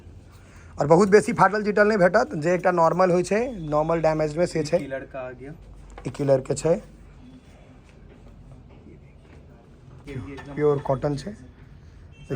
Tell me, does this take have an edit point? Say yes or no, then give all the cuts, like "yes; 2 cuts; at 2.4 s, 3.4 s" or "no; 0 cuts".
yes; 1 cut; at 10.1 s